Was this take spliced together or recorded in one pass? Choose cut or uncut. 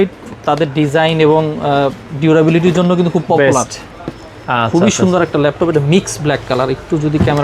uncut